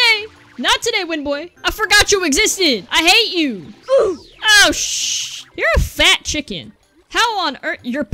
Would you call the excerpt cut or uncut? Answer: uncut